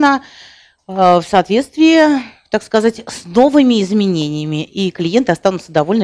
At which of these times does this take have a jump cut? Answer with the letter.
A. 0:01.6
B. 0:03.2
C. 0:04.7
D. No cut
D